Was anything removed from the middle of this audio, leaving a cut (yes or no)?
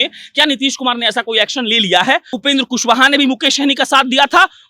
yes